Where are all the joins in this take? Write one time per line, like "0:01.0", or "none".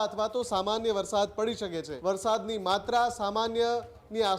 0:01.9